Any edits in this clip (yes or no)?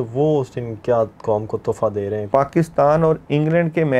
yes